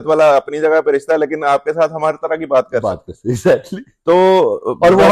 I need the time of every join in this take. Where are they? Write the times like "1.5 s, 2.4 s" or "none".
none